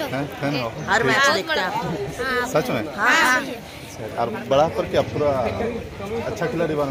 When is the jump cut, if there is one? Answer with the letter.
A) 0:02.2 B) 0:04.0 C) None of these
B